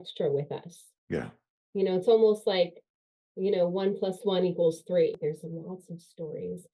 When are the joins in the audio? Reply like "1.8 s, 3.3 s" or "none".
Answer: 5.2 s